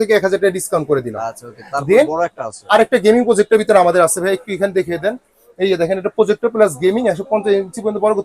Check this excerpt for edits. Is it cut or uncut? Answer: uncut